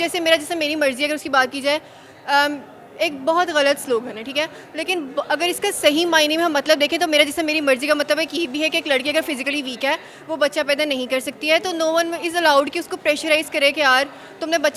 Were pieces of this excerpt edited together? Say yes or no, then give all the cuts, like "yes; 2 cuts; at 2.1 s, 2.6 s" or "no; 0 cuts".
no; 0 cuts